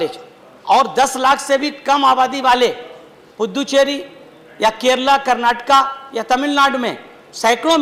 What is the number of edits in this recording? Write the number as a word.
zero